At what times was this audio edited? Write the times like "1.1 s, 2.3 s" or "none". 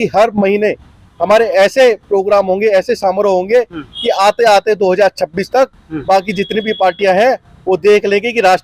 none